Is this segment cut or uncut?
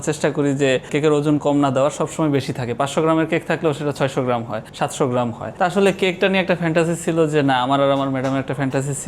cut